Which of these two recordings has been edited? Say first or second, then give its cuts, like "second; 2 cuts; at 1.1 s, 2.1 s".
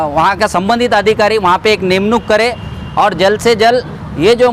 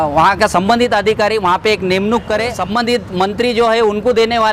second; 1 cut; at 2.5 s